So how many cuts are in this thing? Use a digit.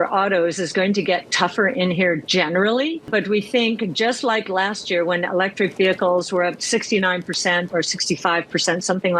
2